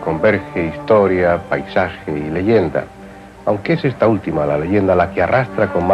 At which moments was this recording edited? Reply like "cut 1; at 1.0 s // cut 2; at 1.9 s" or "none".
none